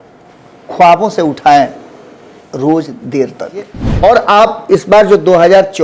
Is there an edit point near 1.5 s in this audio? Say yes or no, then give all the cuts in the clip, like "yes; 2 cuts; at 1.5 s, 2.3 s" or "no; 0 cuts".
no; 1 cut; at 3.8 s